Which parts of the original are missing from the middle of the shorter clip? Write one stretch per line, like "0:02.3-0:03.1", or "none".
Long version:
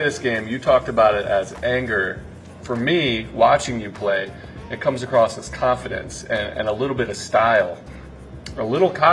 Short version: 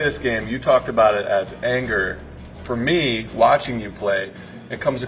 none